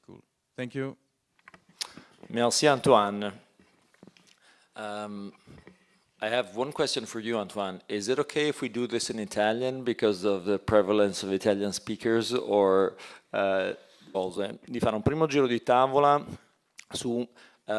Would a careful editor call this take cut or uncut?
cut